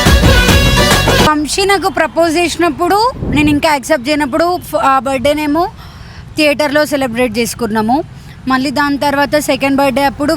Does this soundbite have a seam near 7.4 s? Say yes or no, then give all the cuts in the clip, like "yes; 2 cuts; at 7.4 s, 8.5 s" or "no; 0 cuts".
no; 1 cut; at 1.3 s